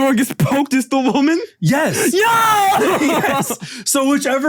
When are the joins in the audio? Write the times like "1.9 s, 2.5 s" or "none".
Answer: none